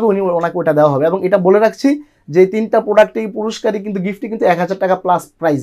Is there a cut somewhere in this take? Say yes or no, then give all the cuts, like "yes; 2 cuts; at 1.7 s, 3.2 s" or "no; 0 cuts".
no; 0 cuts